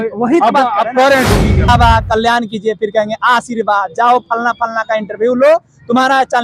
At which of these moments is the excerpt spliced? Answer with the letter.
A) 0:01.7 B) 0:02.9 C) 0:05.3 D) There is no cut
A